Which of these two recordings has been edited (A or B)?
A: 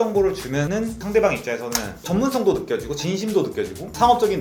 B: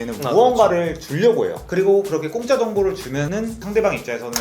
B